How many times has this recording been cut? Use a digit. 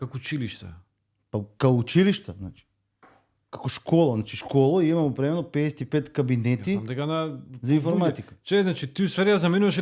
0